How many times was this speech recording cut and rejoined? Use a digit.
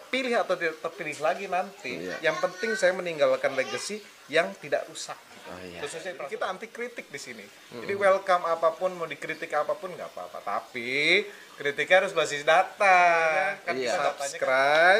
2